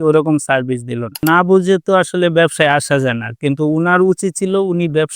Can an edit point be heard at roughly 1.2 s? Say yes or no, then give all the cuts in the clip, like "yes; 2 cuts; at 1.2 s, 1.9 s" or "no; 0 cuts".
yes; 1 cut; at 1.2 s